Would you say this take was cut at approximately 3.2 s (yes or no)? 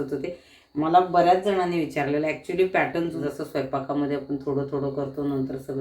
yes